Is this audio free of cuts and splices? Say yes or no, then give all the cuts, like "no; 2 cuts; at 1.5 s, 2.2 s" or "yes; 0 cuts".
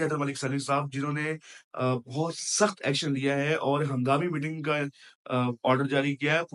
yes; 0 cuts